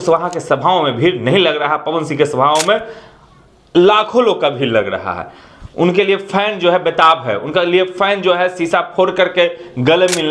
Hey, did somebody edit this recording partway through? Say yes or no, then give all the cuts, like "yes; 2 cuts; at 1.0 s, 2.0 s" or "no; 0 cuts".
no; 0 cuts